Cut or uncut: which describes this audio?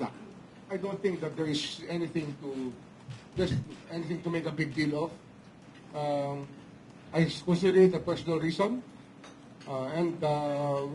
uncut